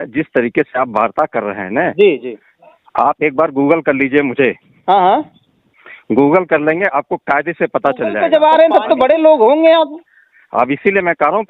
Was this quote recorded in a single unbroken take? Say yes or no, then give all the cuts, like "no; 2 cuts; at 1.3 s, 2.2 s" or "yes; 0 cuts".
no; 1 cut; at 8.2 s